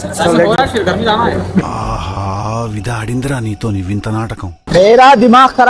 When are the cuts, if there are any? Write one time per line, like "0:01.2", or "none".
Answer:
0:04.6